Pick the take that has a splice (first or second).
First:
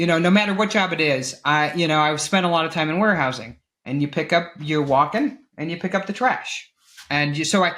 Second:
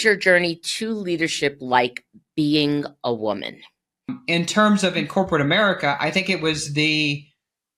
second